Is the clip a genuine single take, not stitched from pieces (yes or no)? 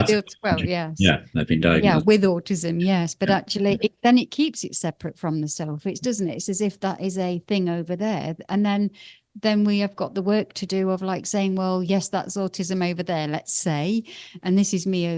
yes